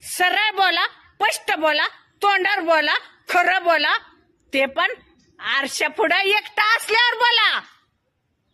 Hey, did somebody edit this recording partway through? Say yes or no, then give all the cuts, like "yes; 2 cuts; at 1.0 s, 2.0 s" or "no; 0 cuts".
no; 0 cuts